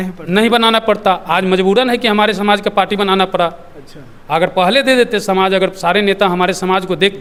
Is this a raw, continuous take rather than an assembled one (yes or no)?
yes